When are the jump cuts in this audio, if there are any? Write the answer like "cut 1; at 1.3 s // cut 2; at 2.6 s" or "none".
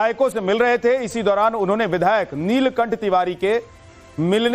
cut 1; at 3.2 s